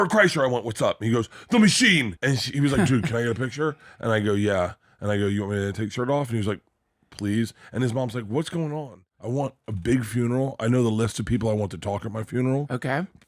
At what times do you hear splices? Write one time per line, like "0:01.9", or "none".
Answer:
0:02.1
0:09.1